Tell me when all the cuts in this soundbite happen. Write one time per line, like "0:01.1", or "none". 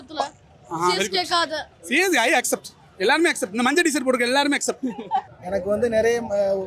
0:05.3